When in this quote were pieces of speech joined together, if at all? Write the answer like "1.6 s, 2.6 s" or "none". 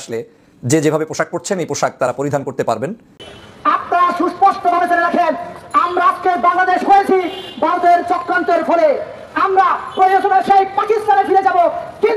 3.2 s